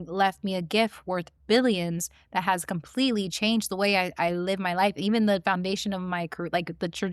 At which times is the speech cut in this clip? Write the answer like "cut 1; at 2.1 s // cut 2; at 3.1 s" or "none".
none

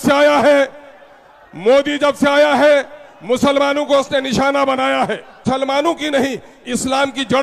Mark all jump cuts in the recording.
cut 1; at 5.4 s

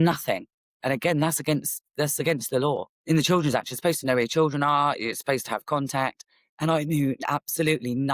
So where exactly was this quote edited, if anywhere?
cut 1; at 2.9 s

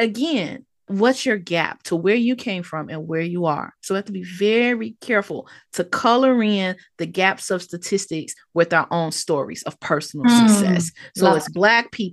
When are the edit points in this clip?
cut 1; at 0.9 s

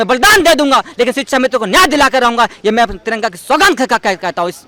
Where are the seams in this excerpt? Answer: none

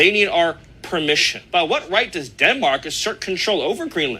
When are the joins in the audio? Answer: cut 1; at 1.4 s

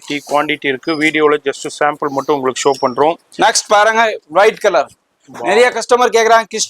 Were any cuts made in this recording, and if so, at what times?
none

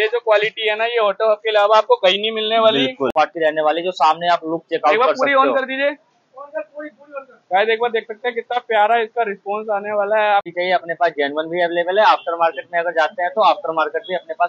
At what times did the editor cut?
cut 1; at 3.1 s // cut 2; at 10.5 s

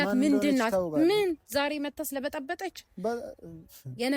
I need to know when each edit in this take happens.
none

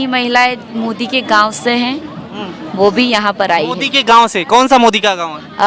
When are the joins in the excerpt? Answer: none

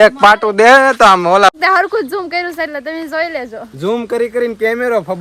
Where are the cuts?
cut 1; at 1.5 s

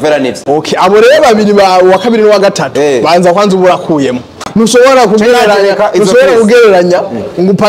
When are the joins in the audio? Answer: cut 1; at 4.5 s

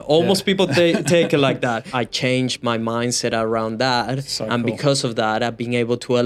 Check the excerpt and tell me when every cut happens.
cut 1; at 1.9 s

